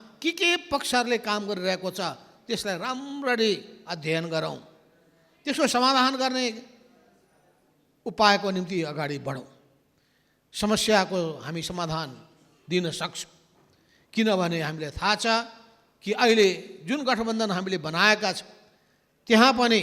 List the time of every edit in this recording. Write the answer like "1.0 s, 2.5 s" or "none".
none